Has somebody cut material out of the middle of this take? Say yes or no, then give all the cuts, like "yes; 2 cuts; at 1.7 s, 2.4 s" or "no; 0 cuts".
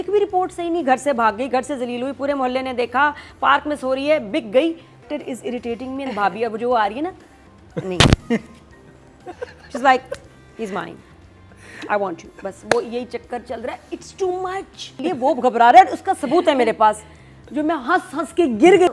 yes; 3 cuts; at 5.1 s, 9.4 s, 14.9 s